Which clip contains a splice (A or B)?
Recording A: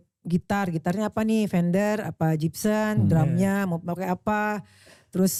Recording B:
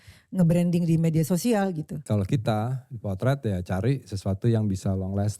B